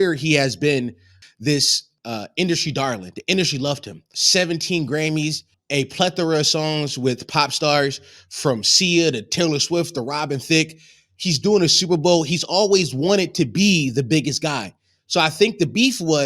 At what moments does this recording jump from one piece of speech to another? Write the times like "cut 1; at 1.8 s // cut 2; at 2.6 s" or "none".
cut 1; at 1.7 s // cut 2; at 4.1 s // cut 3; at 5.5 s